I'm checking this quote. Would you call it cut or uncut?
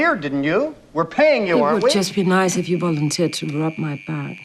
cut